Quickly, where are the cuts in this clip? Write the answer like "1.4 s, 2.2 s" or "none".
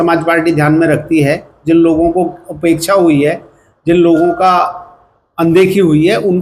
none